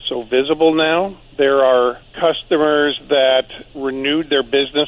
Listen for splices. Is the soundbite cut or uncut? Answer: cut